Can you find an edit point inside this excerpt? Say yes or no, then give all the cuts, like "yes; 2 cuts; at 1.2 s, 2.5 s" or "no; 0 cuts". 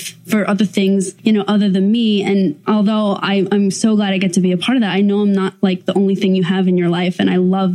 yes; 2 cuts; at 1.1 s, 2.6 s